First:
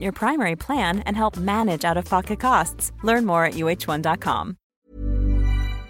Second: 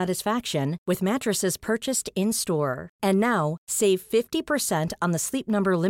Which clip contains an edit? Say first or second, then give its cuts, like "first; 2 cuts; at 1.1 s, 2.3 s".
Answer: first; 1 cut; at 4.9 s